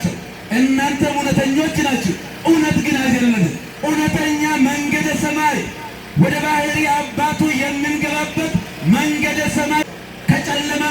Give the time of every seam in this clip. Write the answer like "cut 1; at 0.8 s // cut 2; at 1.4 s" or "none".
cut 1; at 3.7 s // cut 2; at 9.8 s